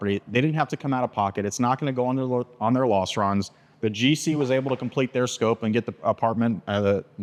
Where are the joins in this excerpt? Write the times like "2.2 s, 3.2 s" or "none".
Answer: none